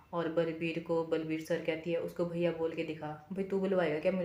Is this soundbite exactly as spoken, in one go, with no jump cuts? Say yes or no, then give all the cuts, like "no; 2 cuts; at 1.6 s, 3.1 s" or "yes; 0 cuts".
yes; 0 cuts